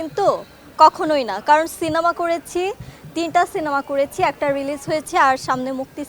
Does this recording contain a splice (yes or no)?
no